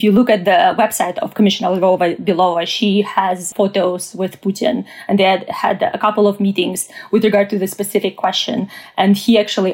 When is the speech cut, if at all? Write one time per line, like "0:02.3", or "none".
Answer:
0:03.5